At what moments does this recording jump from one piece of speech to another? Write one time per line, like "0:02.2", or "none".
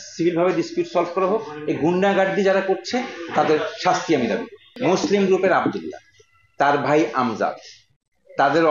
0:04.7